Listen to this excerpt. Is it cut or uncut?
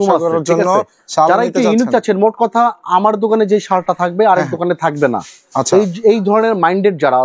uncut